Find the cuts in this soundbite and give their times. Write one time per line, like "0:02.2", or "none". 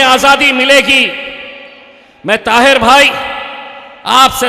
none